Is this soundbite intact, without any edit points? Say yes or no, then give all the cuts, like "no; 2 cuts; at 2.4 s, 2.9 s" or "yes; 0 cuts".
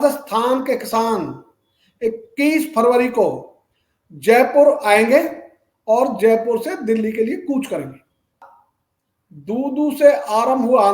no; 1 cut; at 8.4 s